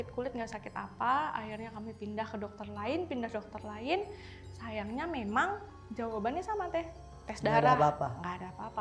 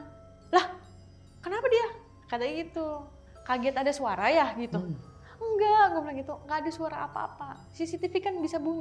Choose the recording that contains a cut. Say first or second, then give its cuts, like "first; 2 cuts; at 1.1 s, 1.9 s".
second; 1 cut; at 6.4 s